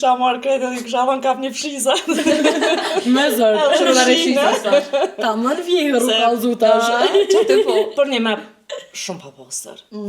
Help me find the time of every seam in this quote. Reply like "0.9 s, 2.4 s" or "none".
none